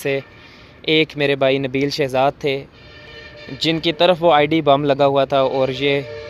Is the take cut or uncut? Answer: uncut